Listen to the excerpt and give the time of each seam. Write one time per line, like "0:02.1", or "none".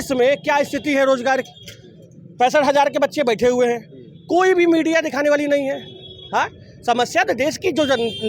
none